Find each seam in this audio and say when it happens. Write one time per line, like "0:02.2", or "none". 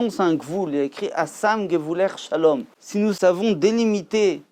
0:03.2